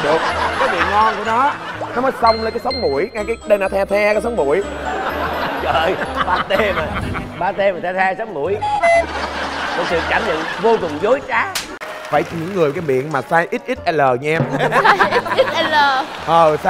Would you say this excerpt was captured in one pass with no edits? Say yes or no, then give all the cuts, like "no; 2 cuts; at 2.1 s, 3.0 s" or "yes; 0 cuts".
no; 1 cut; at 11.9 s